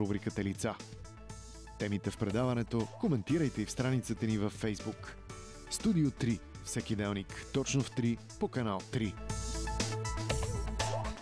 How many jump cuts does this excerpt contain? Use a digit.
1